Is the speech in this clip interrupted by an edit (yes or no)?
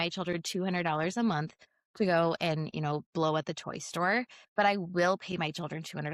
no